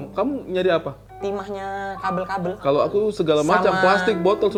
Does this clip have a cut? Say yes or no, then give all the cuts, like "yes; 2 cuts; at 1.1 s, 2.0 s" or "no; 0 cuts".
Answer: no; 0 cuts